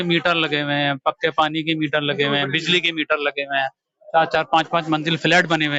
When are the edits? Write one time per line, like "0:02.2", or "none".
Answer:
none